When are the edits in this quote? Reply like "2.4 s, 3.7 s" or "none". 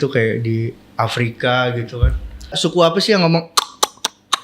2.6 s